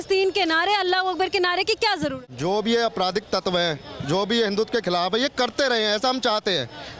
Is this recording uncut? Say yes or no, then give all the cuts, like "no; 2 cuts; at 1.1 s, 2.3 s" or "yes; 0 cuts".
no; 1 cut; at 2.2 s